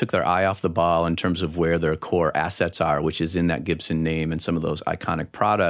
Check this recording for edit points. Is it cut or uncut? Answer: uncut